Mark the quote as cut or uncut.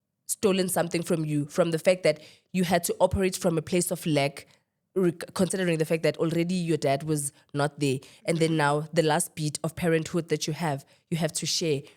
uncut